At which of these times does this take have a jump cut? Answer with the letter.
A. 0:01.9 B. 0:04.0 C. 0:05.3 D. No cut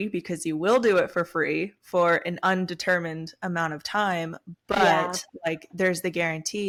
D